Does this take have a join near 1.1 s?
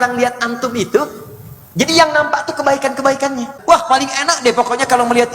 no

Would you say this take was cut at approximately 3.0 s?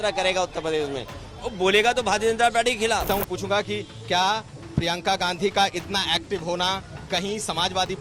yes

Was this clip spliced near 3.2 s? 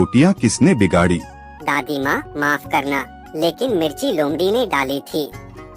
no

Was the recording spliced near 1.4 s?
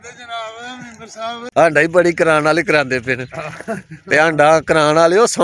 yes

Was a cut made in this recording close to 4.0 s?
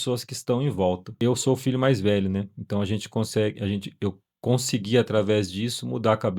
no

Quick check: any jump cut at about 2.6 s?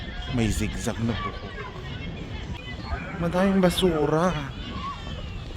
yes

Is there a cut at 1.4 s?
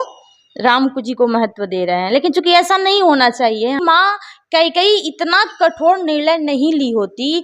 no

